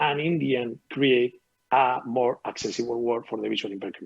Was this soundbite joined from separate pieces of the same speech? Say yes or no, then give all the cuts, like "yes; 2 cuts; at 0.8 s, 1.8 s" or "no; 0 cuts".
no; 0 cuts